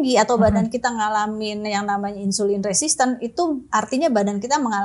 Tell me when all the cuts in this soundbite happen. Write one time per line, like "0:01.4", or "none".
none